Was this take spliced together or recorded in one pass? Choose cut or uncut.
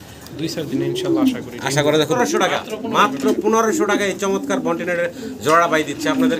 cut